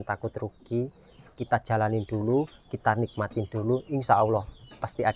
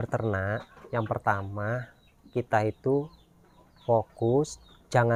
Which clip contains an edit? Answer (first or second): first